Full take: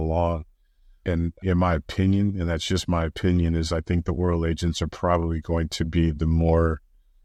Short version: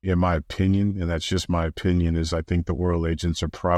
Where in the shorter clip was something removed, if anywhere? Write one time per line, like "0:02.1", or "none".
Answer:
none